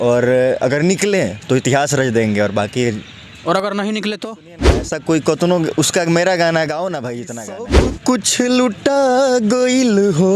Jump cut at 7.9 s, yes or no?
yes